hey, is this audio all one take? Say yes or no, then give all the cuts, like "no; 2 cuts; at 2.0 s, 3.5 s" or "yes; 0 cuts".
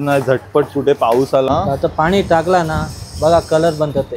no; 1 cut; at 1.5 s